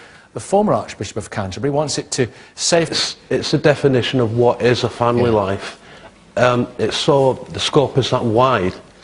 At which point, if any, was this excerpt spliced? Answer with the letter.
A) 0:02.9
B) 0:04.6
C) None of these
C